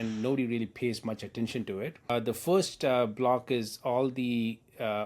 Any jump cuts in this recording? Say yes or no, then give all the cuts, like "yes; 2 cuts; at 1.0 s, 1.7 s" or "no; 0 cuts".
yes; 1 cut; at 2.1 s